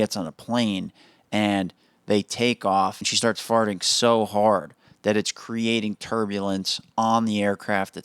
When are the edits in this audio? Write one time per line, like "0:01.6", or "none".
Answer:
0:03.0